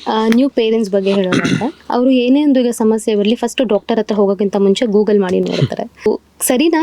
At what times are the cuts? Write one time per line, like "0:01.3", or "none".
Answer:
0:01.8
0:06.1